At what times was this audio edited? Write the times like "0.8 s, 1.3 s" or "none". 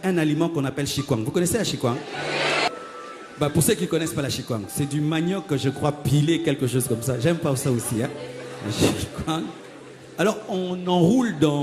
2.7 s